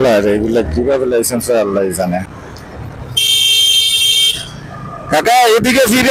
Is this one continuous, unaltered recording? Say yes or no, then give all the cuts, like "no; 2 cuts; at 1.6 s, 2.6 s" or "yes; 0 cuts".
no; 1 cut; at 2.3 s